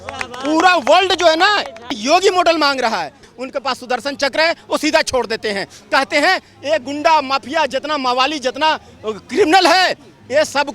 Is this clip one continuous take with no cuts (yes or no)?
no